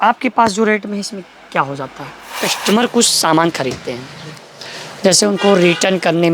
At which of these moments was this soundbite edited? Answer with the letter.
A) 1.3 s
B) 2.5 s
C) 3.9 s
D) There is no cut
B